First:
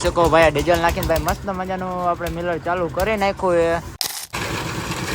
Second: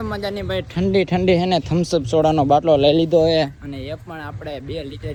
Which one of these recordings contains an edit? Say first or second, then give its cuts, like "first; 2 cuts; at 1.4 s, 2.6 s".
first; 1 cut; at 4.0 s